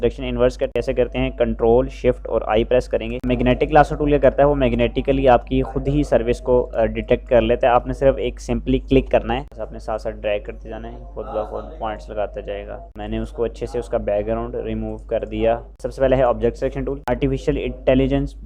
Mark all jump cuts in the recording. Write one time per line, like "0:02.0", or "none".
0:03.1
0:09.5
0:12.8
0:15.7